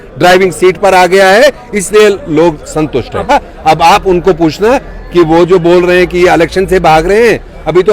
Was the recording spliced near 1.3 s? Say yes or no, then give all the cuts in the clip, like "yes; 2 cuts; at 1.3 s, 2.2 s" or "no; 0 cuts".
no; 1 cut; at 3.3 s